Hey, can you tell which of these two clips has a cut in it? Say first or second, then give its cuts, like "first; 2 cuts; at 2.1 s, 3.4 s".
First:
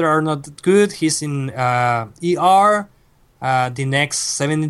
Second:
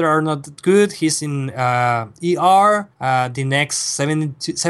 second; 1 cut; at 2.9 s